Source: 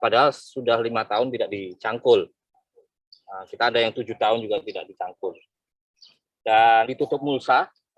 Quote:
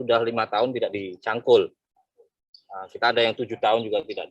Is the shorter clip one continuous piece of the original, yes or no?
yes